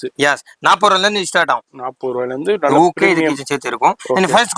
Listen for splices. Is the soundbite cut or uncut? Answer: uncut